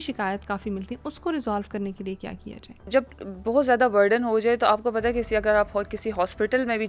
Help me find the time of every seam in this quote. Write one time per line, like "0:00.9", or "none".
0:02.9